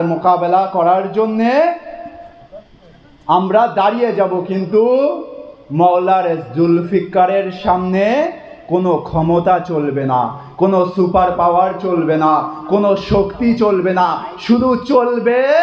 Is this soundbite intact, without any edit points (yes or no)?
yes